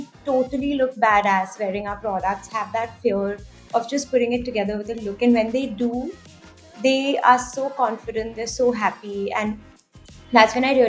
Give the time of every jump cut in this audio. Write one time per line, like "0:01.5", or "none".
none